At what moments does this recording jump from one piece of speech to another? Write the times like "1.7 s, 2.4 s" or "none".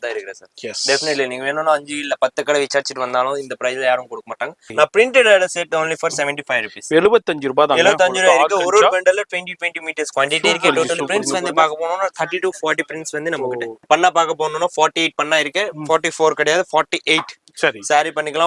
4.7 s, 13.8 s

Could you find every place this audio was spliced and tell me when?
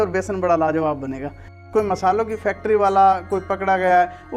1.2 s

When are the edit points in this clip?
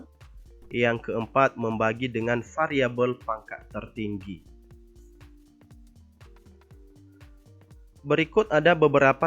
4.5 s, 8.0 s

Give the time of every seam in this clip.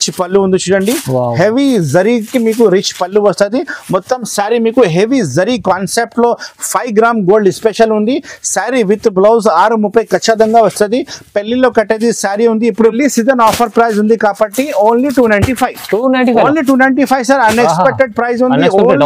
12.9 s

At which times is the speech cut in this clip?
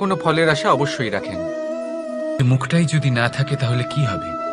2.4 s

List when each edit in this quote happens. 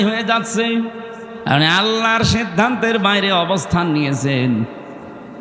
1.3 s

